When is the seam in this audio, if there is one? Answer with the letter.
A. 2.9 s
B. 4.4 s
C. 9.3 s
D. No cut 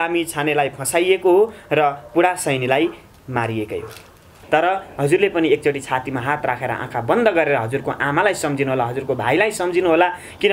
B